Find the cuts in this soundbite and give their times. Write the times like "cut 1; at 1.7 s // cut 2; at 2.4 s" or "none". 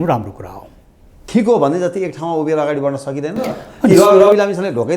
cut 1; at 1.2 s